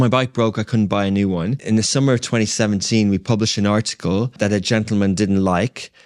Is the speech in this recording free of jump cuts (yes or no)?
no